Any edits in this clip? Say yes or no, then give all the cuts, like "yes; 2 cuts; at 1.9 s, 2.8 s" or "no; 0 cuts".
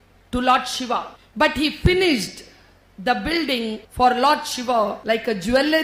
yes; 3 cuts; at 1.2 s, 3.8 s, 5.0 s